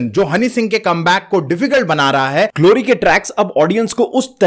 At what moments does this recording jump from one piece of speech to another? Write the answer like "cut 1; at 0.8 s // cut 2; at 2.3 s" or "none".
cut 1; at 2.5 s